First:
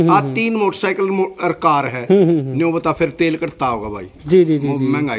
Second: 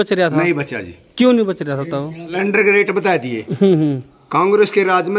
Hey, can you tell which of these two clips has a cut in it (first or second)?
second